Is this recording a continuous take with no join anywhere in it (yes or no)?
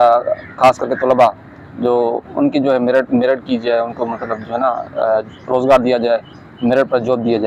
yes